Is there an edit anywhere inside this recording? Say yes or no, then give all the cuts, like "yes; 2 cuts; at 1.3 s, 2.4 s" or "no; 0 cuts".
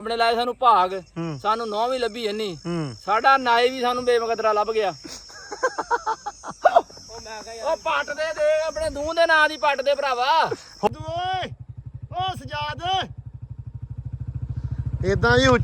yes; 1 cut; at 10.9 s